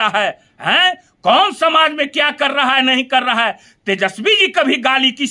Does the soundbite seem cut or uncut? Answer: uncut